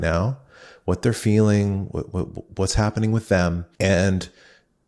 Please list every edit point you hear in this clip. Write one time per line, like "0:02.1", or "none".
0:03.7